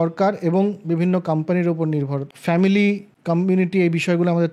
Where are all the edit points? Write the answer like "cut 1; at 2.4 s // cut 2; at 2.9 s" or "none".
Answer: cut 1; at 2.3 s // cut 2; at 3.1 s